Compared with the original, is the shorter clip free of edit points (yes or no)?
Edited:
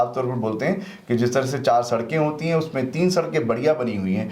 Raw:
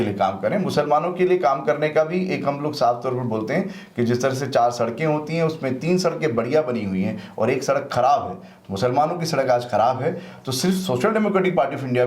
yes